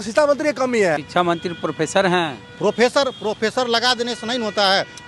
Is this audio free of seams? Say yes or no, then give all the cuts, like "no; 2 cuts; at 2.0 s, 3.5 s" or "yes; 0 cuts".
no; 1 cut; at 1.0 s